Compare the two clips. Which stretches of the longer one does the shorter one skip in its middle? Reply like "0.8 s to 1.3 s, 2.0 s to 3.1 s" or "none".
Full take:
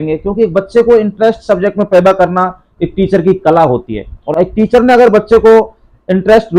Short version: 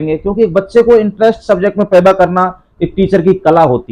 none